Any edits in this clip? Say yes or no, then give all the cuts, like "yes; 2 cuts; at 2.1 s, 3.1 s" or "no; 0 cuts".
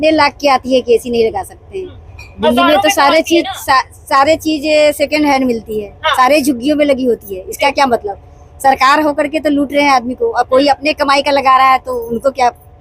no; 0 cuts